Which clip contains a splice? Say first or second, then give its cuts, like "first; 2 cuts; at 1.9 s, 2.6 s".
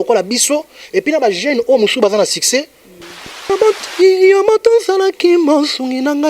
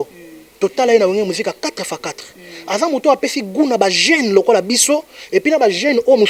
first; 1 cut; at 3.5 s